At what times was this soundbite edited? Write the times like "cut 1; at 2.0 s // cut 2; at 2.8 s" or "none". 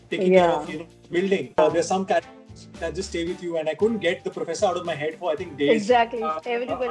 cut 1; at 1.6 s